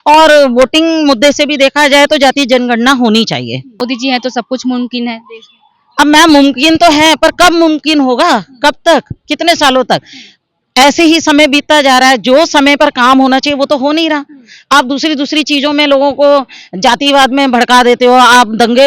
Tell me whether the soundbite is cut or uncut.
cut